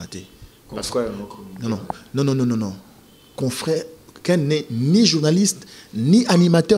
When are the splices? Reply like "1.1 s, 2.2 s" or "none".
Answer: none